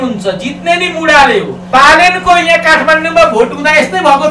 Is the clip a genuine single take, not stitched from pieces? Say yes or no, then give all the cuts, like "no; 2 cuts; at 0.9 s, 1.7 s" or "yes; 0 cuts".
no; 1 cut; at 1.7 s